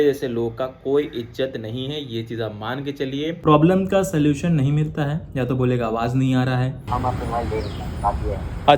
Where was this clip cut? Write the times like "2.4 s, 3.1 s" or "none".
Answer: 3.4 s, 6.8 s